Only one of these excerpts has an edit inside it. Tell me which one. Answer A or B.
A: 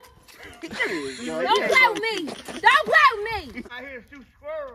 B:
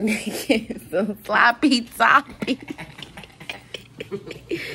A